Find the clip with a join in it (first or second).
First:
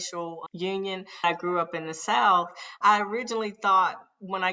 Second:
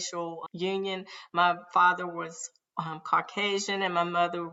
first